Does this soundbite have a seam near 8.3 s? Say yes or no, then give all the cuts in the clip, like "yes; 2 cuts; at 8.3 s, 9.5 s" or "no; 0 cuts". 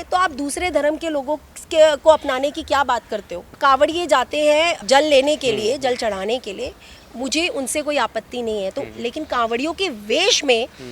no; 2 cuts; at 3.6 s, 4.8 s